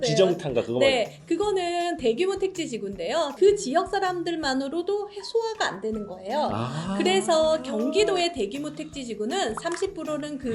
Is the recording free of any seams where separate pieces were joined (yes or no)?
no